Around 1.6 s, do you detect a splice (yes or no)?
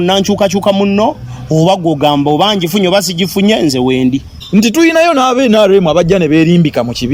no